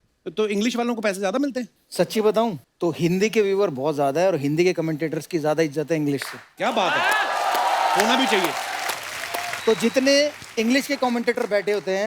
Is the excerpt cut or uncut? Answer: cut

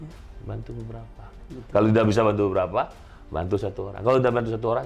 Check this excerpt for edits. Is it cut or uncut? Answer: uncut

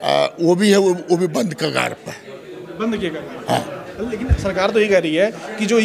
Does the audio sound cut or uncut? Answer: uncut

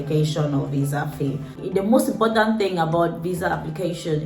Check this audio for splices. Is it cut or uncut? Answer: cut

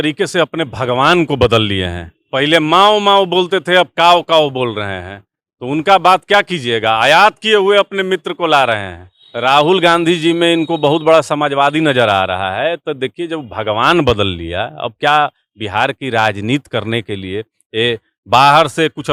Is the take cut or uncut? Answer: uncut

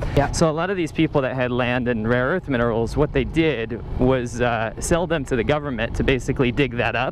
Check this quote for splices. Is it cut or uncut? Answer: cut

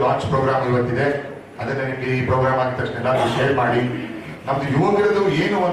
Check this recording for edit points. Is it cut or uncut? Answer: uncut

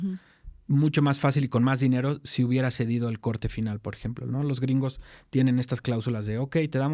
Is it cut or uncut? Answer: uncut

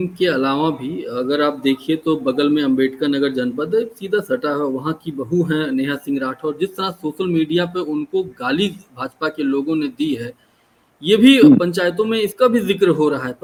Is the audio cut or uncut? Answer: uncut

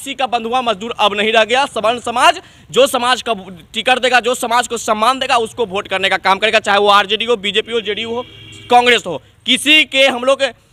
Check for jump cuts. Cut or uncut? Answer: uncut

